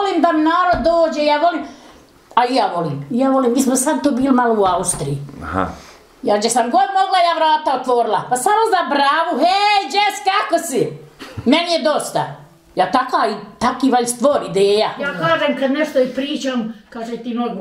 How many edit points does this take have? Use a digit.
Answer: 1